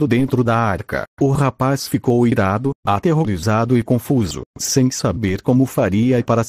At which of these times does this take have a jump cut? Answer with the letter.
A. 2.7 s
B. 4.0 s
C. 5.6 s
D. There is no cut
B